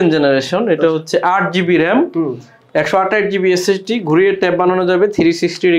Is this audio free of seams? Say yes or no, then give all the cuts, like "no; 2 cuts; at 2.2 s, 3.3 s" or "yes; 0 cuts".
yes; 0 cuts